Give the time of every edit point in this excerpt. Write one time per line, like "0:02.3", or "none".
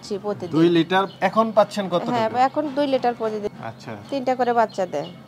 0:03.5